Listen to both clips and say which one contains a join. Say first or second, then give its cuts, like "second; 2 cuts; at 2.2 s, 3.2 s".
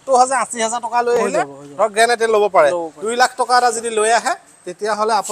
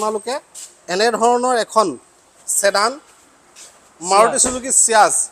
first; 1 cut; at 2.9 s